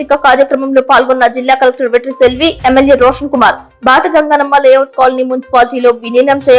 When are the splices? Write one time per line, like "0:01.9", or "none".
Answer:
none